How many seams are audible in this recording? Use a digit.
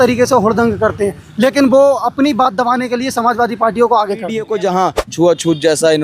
1